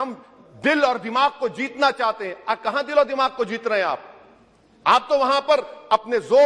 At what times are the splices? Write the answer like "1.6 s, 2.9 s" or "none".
none

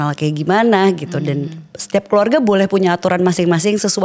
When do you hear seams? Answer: none

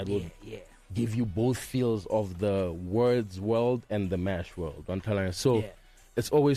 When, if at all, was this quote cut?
none

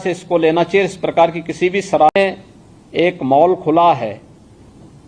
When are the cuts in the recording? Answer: 2.1 s

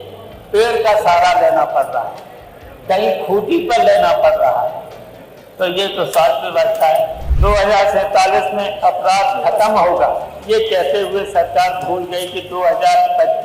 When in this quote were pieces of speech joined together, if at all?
7.2 s

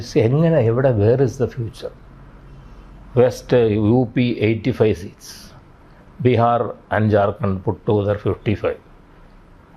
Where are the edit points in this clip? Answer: none

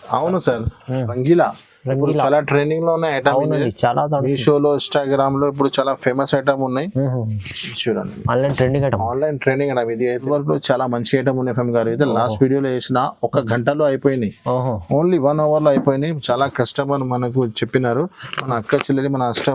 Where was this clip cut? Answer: 1.2 s, 10.2 s

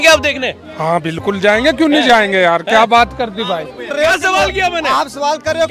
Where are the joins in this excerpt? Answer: 3.8 s

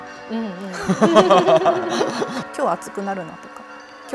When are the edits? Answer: 2.5 s

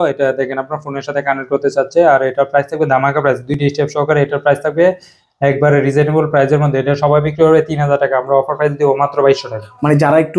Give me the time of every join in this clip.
none

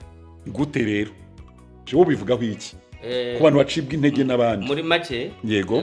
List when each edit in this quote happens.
1.9 s

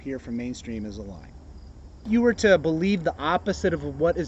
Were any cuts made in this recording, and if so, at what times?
2.1 s

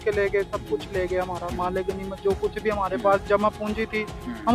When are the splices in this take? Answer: none

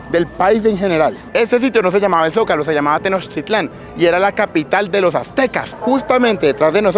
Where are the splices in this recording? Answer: 1.3 s, 5.7 s

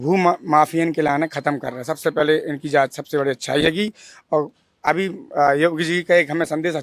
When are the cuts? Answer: none

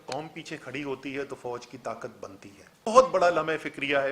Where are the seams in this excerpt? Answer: 2.9 s

